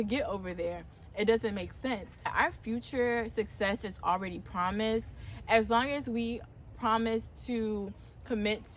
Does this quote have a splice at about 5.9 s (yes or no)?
no